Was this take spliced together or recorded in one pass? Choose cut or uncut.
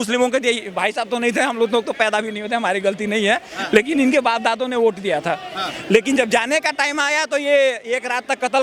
uncut